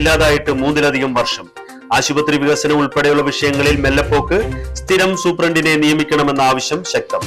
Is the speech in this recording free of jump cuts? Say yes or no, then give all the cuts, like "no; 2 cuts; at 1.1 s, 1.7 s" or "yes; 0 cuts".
yes; 0 cuts